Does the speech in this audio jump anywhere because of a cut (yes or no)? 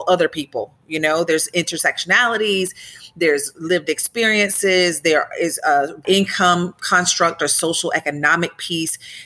yes